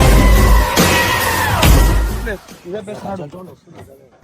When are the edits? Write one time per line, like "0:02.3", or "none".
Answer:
0:02.2